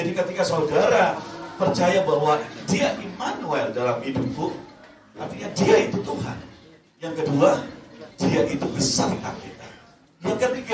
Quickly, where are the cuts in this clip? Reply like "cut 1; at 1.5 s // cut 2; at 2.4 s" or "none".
none

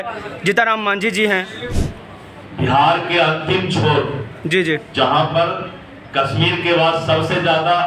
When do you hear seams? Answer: cut 1; at 1.7 s

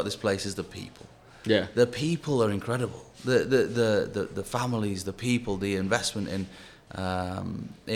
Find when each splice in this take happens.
none

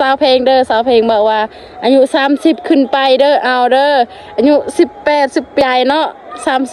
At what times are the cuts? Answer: cut 1; at 5.6 s

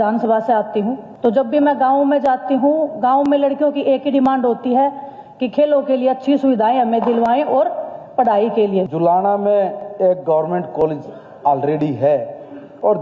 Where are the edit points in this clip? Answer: cut 1; at 1.0 s // cut 2; at 8.9 s

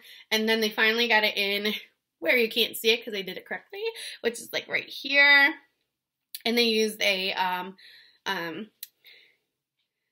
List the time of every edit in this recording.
none

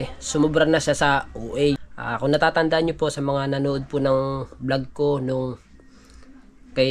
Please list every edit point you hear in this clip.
cut 1; at 1.9 s

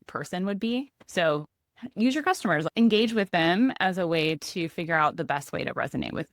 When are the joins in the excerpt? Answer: cut 1; at 1.0 s

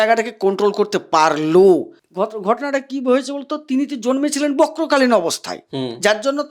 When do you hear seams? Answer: cut 1; at 2.0 s

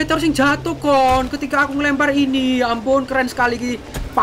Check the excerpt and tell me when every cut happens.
none

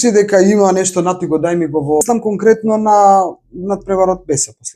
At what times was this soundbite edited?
cut 1; at 2.0 s

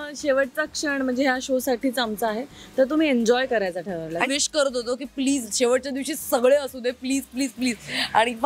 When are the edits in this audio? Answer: cut 1; at 4.2 s

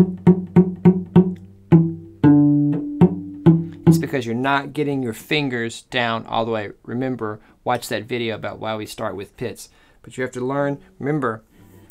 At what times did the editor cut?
none

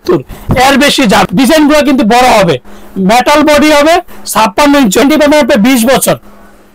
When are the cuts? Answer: cut 1; at 1.2 s // cut 2; at 5.0 s

